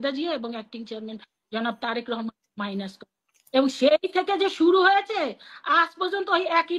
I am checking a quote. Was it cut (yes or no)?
no